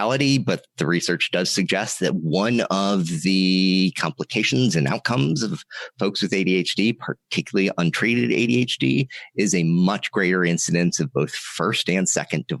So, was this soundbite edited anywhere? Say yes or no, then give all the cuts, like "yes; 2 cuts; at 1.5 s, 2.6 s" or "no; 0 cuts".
no; 0 cuts